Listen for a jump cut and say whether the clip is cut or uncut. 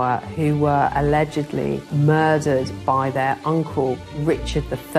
cut